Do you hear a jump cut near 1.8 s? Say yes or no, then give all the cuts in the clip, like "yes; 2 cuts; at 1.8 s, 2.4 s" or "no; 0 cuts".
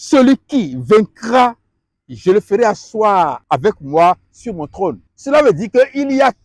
no; 2 cuts; at 3.4 s, 5.1 s